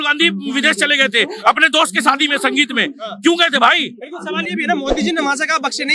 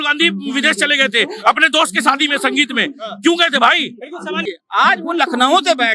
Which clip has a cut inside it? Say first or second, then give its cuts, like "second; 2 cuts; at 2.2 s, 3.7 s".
second; 1 cut; at 4.5 s